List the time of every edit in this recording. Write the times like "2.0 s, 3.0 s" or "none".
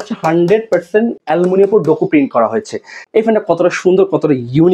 1.2 s, 2.9 s

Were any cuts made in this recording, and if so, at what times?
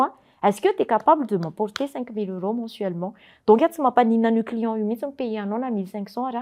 none

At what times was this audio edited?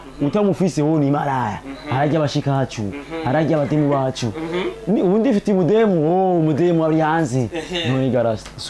none

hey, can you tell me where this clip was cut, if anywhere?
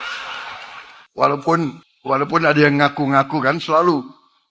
0.9 s, 1.9 s

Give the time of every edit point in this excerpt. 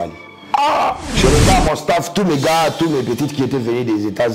1.1 s

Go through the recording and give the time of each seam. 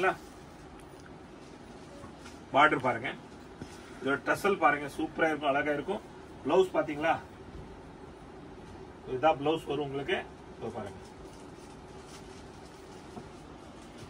none

